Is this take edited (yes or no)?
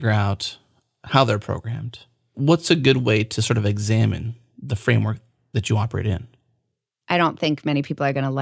yes